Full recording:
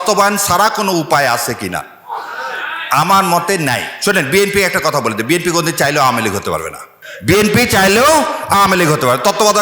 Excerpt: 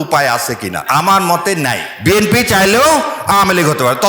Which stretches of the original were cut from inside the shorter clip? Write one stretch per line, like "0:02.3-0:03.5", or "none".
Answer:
0:01.8-0:02.8
0:03.9-0:07.1